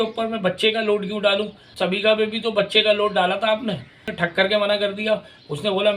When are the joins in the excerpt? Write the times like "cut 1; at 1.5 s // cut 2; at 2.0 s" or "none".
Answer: cut 1; at 1.6 s // cut 2; at 4.1 s